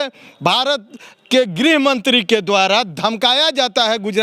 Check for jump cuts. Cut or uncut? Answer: uncut